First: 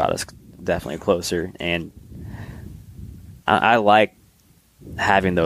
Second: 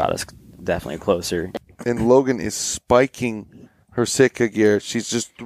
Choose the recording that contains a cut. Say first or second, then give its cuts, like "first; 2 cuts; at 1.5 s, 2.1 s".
second; 1 cut; at 1.6 s